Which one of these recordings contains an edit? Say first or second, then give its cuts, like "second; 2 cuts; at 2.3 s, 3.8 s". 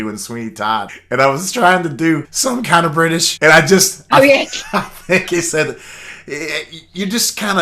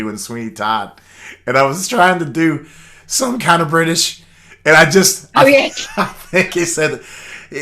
first; 3 cuts; at 1.0 s, 2.3 s, 3.3 s